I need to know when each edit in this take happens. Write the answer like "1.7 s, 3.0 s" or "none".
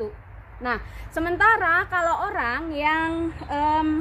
none